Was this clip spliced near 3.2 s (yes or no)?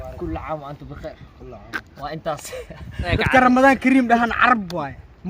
yes